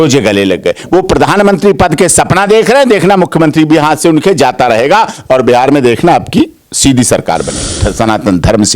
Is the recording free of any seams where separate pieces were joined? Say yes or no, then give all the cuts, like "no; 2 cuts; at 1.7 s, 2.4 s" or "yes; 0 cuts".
no; 1 cut; at 7.7 s